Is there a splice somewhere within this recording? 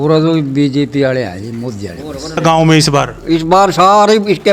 yes; 1 cut; at 2.4 s

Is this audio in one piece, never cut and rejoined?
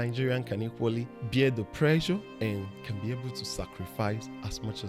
no; 2 cuts; at 1.2 s, 2.3 s

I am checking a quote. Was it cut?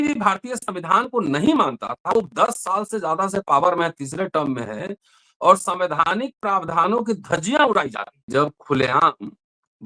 yes; 1 cut; at 8.3 s

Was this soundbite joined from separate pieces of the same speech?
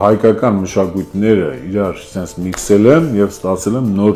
no; 0 cuts

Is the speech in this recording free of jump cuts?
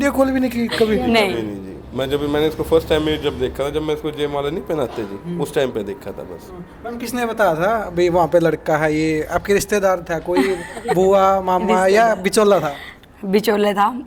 yes; 0 cuts

